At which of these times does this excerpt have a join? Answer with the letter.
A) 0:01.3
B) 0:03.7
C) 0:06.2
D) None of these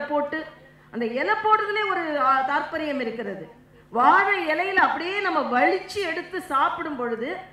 D